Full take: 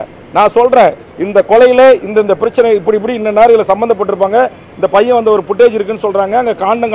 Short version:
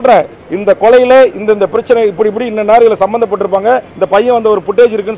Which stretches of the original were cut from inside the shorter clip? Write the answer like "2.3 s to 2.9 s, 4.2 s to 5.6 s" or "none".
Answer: 4.6 s to 4.7 s